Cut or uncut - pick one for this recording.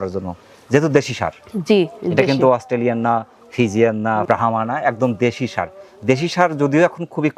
uncut